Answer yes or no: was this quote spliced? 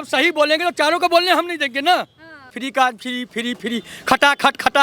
yes